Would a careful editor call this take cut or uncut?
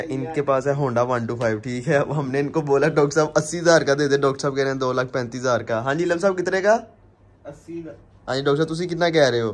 uncut